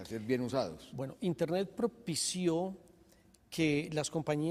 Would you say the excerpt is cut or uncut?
uncut